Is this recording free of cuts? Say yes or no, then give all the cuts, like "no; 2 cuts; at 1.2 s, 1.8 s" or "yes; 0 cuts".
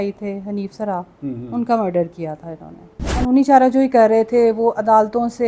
no; 1 cut; at 3.2 s